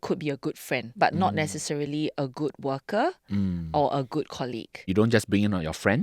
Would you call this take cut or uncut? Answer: cut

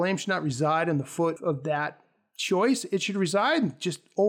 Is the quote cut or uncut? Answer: cut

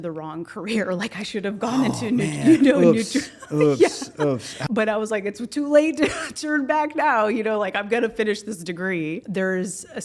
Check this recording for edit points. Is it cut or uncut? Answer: cut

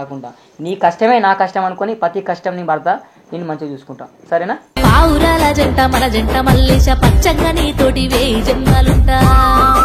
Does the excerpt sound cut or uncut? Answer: uncut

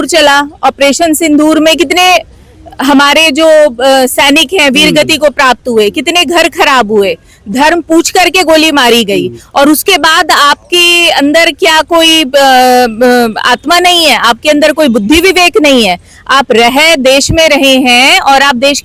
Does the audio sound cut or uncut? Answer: uncut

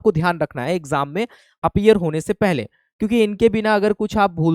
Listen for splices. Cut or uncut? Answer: uncut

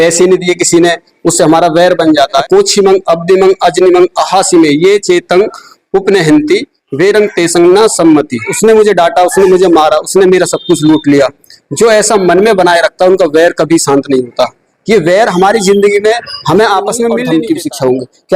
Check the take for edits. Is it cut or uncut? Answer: cut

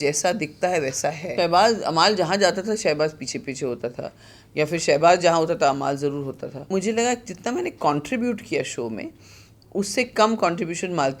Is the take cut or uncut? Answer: cut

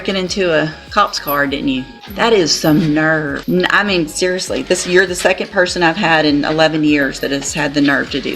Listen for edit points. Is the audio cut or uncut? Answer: cut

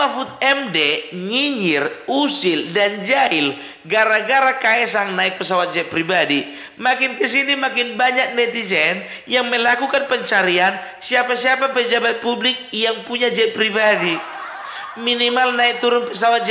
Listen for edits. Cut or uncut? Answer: uncut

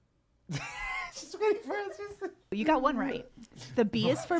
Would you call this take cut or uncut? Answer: cut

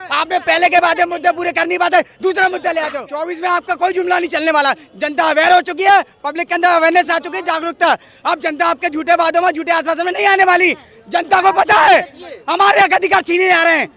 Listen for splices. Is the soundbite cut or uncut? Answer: cut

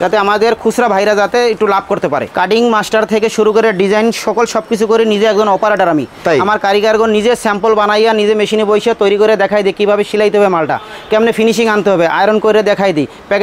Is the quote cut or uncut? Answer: cut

